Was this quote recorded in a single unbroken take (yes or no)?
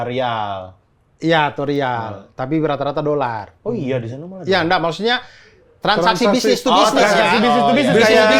yes